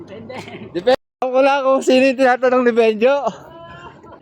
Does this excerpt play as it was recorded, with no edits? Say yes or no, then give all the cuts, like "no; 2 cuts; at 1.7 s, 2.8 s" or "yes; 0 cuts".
no; 1 cut; at 0.9 s